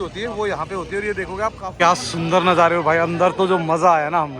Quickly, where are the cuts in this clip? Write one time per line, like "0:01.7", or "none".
0:01.6